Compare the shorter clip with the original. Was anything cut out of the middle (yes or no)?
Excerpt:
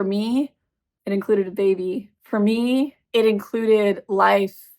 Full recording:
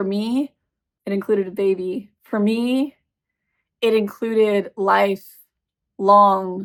yes